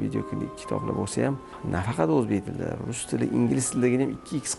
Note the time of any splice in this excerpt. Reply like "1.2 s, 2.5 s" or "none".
1.5 s